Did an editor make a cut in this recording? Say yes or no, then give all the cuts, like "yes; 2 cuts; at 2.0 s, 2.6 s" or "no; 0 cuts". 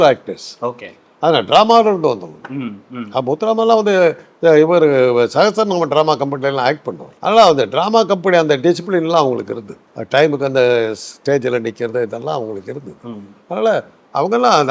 no; 0 cuts